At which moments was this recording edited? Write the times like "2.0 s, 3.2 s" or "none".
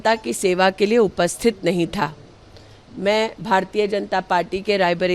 none